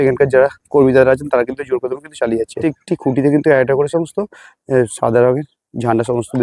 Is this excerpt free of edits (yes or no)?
no